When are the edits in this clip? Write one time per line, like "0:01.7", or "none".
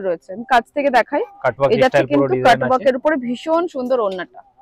none